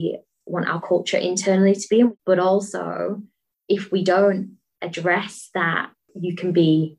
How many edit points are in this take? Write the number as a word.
two